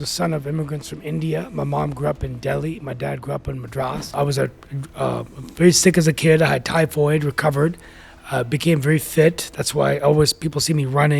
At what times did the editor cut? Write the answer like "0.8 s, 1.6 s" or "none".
4.1 s